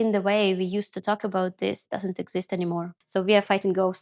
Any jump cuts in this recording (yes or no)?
yes